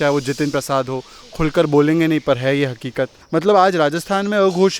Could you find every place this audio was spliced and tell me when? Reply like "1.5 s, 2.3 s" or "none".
3.1 s